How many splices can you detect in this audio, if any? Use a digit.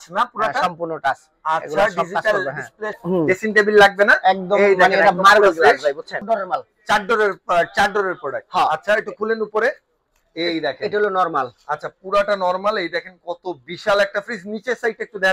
2